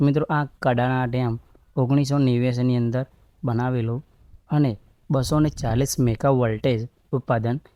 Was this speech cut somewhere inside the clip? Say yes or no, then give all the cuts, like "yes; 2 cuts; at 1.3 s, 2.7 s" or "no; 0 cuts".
no; 0 cuts